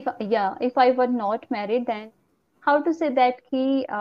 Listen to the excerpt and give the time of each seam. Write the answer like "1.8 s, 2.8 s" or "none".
2.0 s